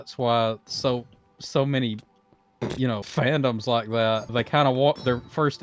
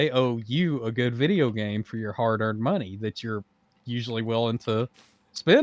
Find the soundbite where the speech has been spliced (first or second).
first